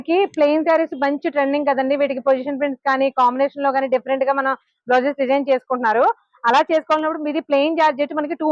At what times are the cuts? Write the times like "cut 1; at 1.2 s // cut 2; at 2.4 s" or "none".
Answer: none